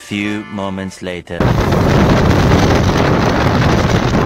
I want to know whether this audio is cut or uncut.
cut